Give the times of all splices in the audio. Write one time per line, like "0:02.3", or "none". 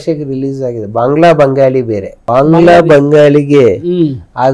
0:02.1